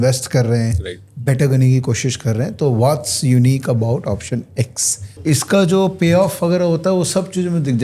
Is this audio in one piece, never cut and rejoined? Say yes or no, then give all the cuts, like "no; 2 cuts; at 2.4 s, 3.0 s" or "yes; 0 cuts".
no; 1 cut; at 5.2 s